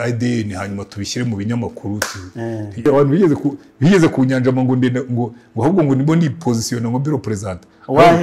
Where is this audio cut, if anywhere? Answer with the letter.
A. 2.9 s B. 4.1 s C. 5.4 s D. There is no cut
A